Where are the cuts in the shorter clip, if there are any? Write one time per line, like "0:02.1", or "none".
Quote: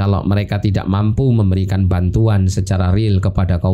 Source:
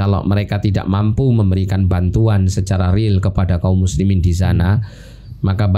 none